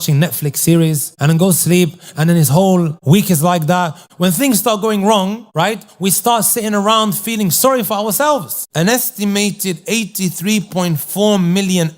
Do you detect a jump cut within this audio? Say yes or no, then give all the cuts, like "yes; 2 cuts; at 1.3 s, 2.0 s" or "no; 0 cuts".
yes; 5 cuts; at 1.1 s, 3.0 s, 4.0 s, 5.4 s, 8.6 s